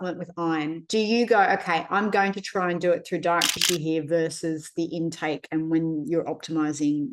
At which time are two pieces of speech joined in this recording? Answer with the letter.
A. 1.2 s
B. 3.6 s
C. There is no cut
B